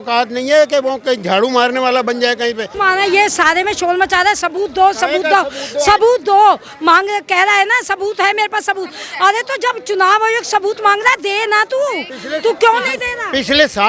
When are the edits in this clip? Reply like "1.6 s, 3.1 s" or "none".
2.7 s